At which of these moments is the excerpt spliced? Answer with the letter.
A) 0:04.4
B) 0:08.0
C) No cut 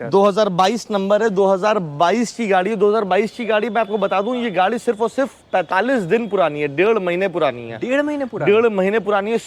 C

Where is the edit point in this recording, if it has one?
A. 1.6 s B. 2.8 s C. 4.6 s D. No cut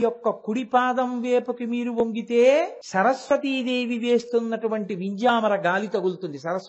B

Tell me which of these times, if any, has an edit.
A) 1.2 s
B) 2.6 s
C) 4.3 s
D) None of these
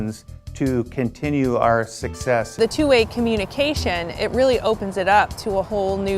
B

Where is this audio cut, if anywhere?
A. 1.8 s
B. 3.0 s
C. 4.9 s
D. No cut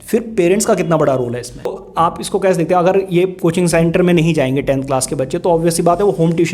A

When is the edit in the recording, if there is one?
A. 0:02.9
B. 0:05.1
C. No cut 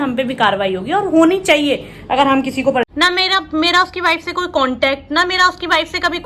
A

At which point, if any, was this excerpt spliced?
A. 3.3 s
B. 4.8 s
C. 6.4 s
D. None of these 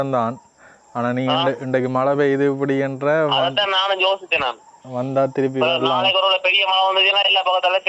D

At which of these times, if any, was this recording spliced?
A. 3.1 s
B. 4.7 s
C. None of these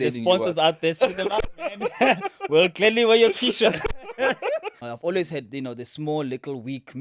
B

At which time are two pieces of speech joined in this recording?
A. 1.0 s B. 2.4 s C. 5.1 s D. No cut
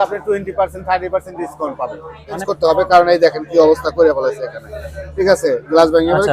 B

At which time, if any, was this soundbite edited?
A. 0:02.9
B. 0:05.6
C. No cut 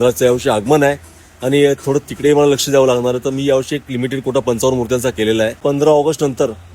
B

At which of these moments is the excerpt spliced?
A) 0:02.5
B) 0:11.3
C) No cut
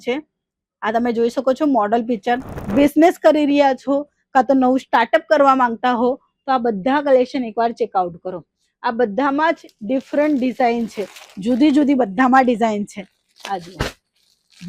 A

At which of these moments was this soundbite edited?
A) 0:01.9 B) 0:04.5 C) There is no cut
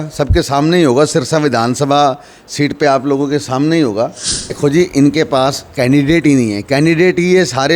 B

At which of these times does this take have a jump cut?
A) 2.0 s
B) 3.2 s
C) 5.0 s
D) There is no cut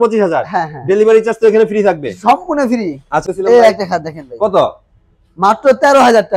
B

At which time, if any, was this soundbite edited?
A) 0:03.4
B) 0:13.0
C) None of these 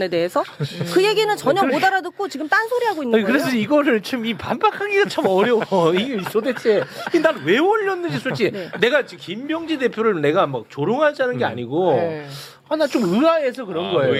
C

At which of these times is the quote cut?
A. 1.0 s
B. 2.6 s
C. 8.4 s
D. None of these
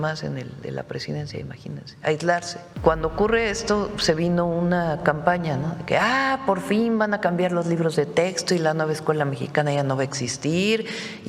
B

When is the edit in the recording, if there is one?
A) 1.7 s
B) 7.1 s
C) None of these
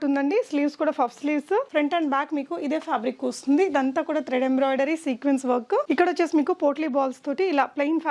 A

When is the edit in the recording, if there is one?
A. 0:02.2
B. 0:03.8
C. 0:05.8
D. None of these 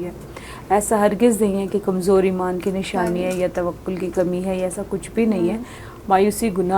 C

